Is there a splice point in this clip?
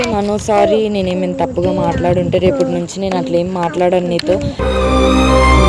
no; 0 cuts

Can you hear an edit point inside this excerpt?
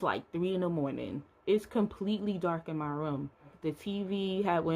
yes; 1 cut; at 3.5 s

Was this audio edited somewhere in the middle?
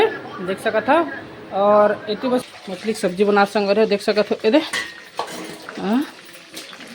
yes; 1 cut; at 2.4 s

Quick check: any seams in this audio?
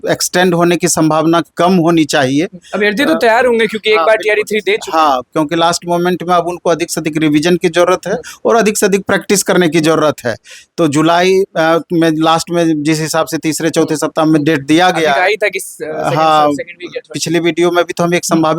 no; 0 cuts

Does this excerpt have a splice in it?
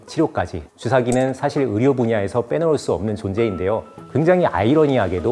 no; 0 cuts

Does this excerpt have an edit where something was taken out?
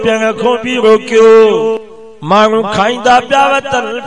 yes; 1 cut; at 1.9 s

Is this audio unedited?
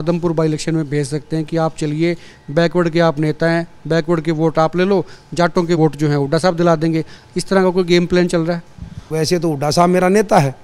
no; 2 cuts; at 5.8 s, 9.0 s

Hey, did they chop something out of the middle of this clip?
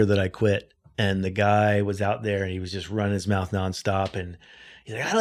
no; 0 cuts

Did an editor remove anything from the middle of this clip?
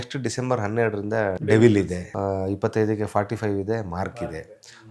yes; 2 cuts; at 1.4 s, 2.0 s

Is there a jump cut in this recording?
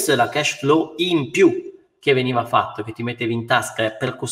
no; 0 cuts

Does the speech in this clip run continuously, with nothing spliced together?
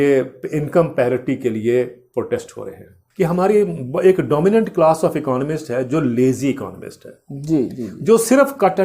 no; 1 cut; at 3.0 s

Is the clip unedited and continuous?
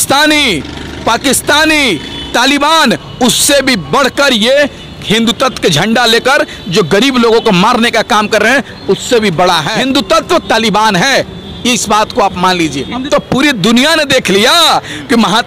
no; 2 cuts; at 9.7 s, 13.0 s

